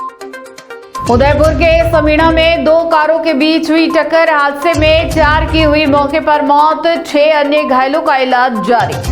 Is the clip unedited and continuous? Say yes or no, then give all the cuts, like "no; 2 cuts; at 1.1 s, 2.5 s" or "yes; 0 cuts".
no; 1 cut; at 1.1 s